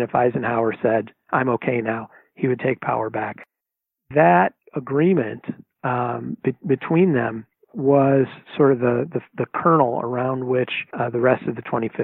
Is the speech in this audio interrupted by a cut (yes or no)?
yes